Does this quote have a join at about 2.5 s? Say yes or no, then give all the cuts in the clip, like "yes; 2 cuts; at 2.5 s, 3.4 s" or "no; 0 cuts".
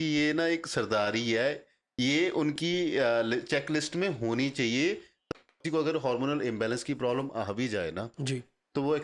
no; 1 cut; at 5.2 s